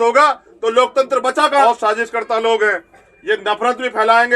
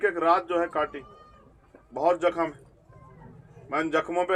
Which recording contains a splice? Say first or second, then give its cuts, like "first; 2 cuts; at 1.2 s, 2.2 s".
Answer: first; 1 cut; at 1.6 s